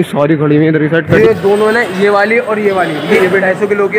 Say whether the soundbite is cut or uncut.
cut